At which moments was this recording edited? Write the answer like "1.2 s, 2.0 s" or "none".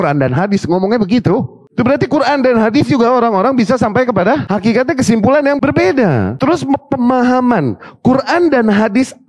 4.4 s, 5.6 s, 6.3 s